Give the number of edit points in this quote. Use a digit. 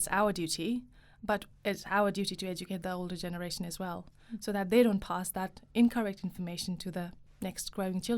1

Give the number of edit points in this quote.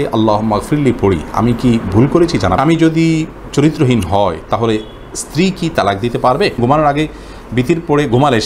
2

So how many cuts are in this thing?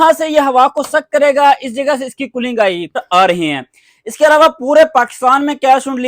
1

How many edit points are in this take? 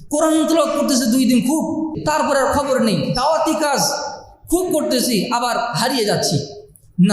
1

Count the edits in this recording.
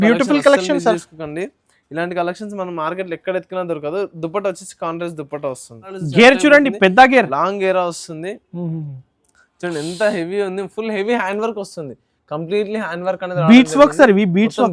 1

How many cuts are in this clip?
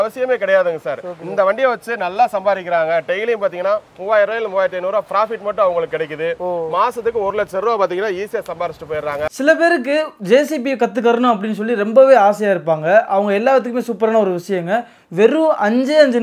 1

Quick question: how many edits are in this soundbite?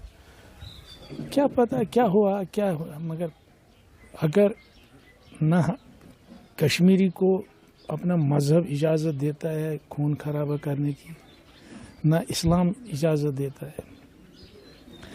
0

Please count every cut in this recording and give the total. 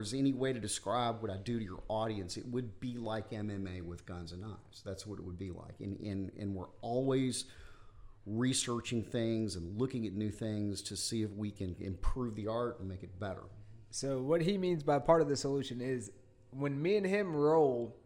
0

